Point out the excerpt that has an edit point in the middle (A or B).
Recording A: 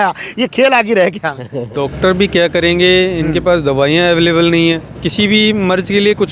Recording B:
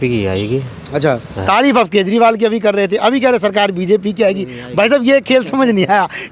A